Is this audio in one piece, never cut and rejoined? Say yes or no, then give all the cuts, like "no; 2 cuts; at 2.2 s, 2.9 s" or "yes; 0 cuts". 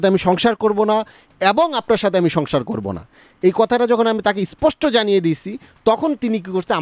yes; 0 cuts